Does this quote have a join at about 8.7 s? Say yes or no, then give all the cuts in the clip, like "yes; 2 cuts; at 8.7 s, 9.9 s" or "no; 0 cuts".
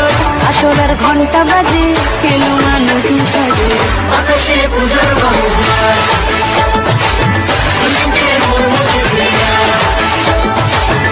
no; 0 cuts